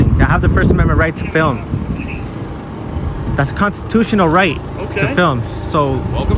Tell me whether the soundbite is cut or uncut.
uncut